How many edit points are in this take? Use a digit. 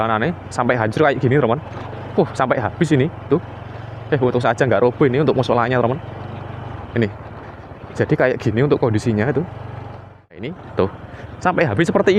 1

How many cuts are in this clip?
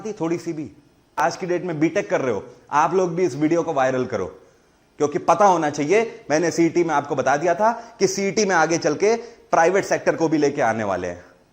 1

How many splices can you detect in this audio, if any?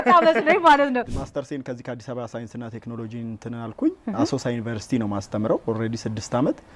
1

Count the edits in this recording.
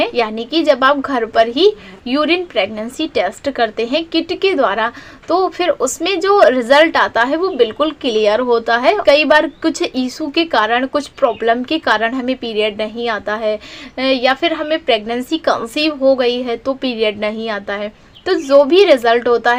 0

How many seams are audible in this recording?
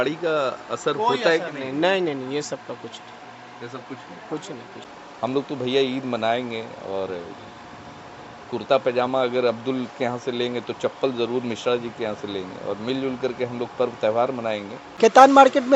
2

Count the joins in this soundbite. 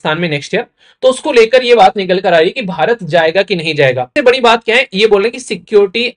1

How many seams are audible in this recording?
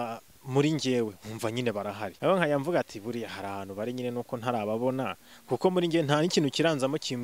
1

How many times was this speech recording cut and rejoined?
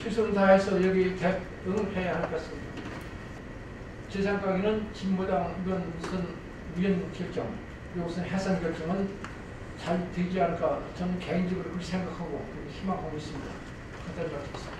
1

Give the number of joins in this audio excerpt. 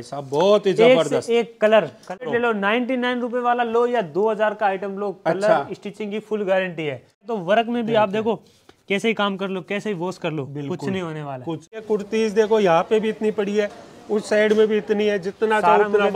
3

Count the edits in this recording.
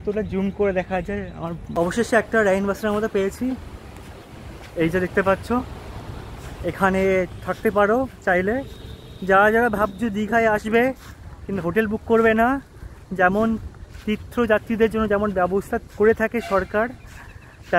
1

